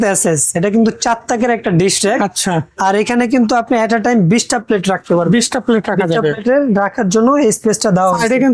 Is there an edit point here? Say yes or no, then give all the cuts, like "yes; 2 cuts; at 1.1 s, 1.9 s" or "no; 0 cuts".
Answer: no; 0 cuts